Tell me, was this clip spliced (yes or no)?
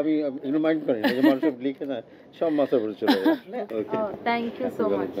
yes